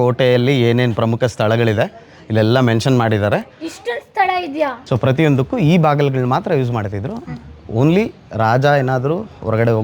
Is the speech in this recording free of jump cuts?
no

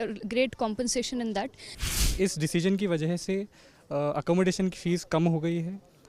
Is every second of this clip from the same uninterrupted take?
no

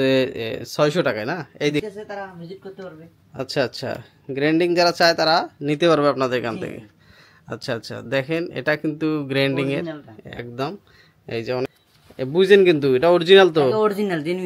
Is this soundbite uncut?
no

